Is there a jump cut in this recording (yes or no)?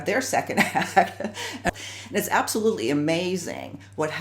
yes